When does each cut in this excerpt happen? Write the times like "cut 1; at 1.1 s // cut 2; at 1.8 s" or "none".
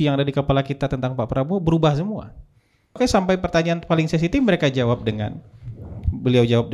cut 1; at 3.0 s